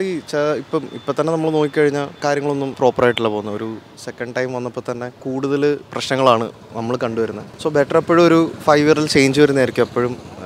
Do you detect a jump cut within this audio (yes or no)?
yes